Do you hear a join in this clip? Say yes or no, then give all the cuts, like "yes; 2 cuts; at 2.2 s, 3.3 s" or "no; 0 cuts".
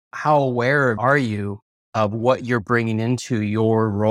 yes; 1 cut; at 1.0 s